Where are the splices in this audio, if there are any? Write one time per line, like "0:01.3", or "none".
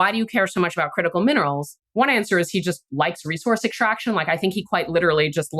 0:01.7